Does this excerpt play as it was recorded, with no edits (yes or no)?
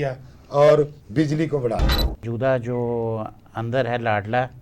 no